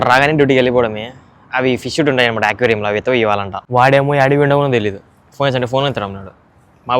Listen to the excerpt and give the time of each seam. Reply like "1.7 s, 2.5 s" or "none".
3.5 s